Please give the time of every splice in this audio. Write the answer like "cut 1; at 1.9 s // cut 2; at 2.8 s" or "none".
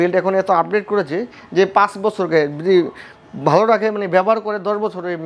none